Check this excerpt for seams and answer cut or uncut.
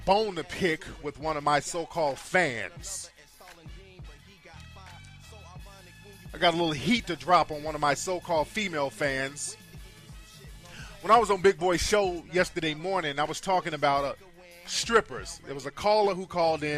cut